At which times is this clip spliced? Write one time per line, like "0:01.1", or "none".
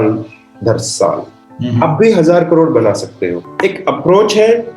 0:03.4